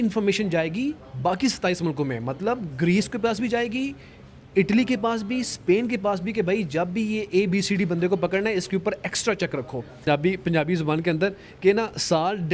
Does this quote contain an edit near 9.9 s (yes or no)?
yes